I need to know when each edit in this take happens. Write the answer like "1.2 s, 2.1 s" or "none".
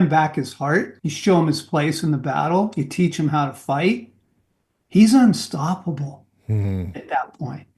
1.0 s